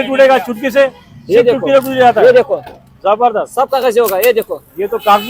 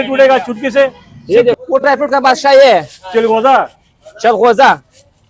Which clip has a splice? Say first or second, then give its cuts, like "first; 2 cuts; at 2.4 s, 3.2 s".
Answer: second; 1 cut; at 1.6 s